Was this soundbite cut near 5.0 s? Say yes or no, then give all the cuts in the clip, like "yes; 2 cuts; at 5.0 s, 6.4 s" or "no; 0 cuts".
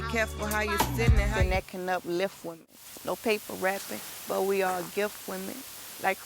no; 1 cut; at 1.3 s